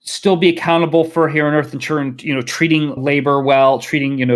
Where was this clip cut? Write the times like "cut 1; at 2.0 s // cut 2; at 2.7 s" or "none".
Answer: none